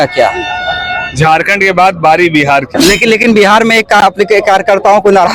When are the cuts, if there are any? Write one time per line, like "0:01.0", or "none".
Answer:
0:02.7